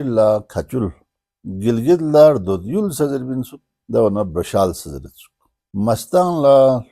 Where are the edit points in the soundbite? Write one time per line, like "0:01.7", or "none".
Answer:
none